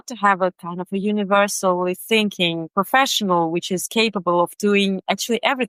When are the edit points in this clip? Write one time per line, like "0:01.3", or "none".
none